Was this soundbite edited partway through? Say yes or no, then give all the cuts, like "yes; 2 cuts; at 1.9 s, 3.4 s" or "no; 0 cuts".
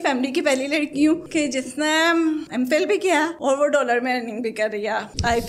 no; 0 cuts